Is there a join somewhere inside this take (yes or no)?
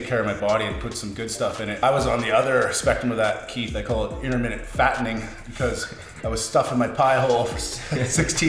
yes